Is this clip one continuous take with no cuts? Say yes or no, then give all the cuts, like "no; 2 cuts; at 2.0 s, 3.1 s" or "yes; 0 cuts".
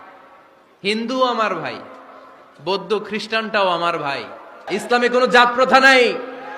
no; 1 cut; at 4.6 s